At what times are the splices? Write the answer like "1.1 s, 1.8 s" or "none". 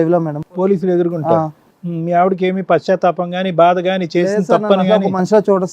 1.6 s